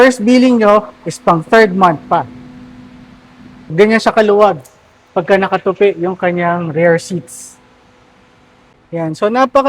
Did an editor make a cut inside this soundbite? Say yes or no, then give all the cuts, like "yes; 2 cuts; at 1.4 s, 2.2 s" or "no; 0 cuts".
yes; 2 cuts; at 3.1 s, 8.7 s